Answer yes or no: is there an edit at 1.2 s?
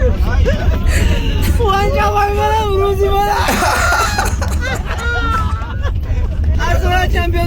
no